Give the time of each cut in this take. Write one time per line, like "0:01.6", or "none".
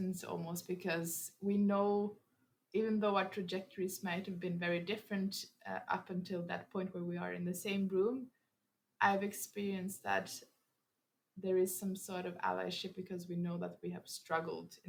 none